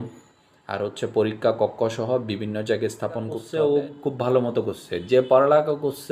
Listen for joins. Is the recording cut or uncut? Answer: cut